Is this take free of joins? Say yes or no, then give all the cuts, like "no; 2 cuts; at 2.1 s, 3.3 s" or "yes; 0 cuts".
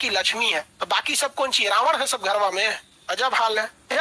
yes; 0 cuts